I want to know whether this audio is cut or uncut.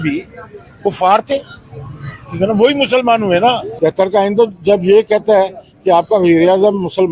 cut